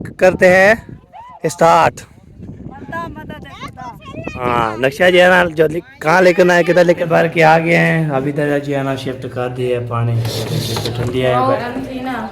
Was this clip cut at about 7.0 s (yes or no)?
yes